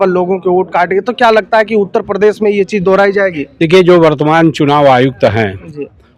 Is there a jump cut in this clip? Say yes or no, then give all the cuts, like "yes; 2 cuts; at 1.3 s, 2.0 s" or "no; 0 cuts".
no; 0 cuts